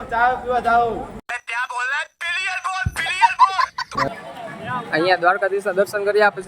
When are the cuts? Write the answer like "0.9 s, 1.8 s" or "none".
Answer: 4.1 s